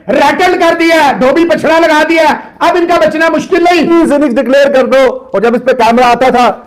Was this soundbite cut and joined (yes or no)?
yes